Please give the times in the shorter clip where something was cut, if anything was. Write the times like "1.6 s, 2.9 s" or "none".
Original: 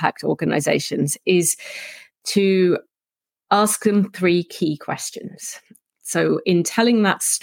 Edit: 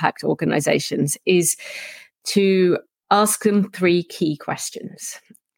2.9 s